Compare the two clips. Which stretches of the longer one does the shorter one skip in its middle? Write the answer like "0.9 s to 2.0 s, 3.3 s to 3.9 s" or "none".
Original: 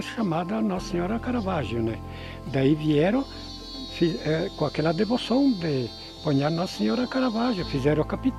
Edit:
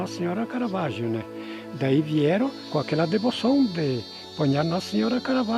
3.4 s to 4.5 s